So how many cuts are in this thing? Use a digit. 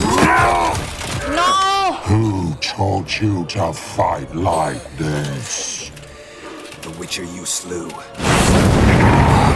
0